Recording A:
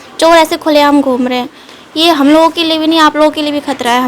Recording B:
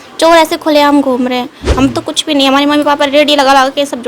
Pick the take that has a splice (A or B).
B